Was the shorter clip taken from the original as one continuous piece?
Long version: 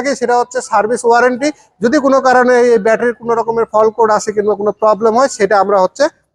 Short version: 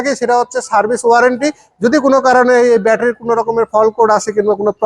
yes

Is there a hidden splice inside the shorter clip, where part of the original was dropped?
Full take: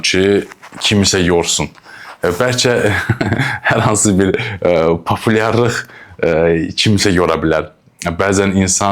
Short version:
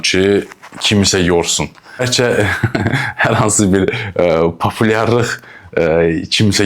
yes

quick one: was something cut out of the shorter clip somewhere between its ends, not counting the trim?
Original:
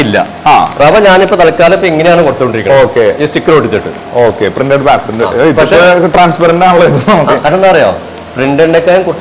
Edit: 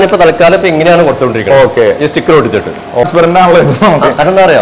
yes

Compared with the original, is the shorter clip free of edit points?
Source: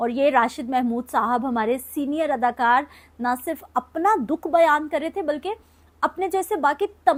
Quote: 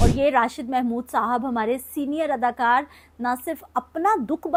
yes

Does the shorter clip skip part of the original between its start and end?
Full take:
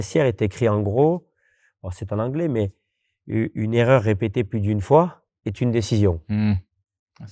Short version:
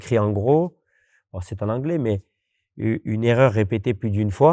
no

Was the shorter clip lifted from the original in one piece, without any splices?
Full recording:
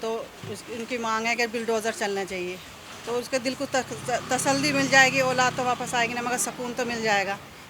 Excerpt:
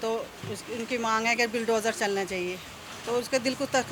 yes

